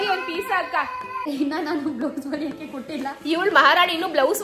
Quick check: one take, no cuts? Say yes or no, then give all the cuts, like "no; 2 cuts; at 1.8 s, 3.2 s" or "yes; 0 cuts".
no; 1 cut; at 1.2 s